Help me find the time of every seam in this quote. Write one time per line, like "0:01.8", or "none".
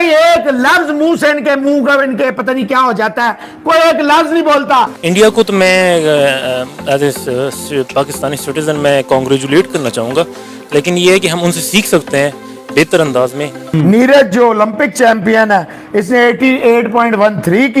0:05.0
0:13.6